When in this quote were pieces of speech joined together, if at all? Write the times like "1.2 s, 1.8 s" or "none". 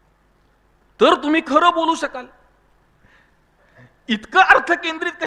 2.9 s